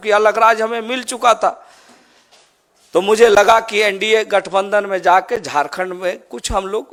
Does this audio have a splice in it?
no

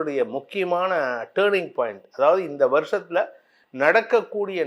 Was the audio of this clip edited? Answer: no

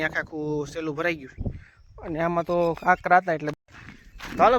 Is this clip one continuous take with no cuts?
no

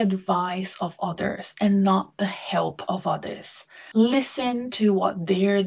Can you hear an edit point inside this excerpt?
no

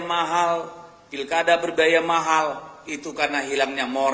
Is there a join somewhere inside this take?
no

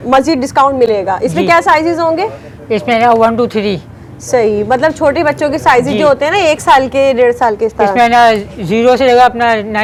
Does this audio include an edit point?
no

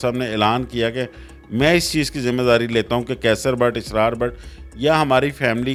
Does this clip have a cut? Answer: no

